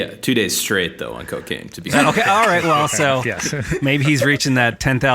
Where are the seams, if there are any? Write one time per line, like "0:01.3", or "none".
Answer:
0:01.9